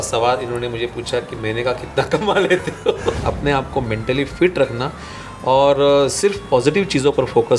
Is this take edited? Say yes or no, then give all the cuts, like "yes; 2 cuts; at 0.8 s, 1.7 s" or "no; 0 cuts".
yes; 1 cut; at 3.2 s